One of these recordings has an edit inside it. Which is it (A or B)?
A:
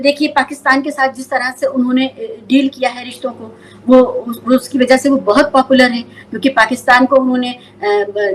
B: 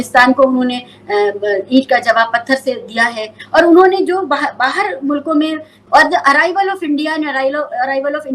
B